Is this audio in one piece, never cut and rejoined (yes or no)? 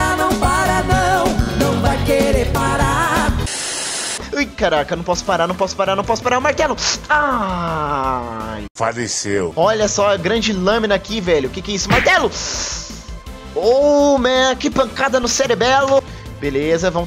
no